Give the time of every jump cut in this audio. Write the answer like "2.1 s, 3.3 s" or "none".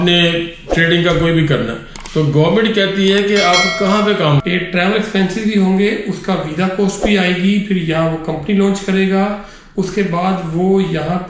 4.4 s